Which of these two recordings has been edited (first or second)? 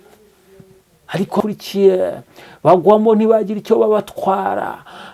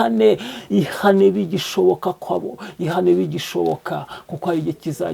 first